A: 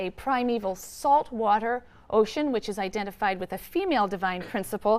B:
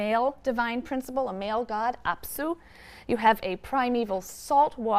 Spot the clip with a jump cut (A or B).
B